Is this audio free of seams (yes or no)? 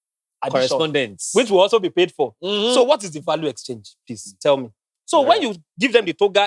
no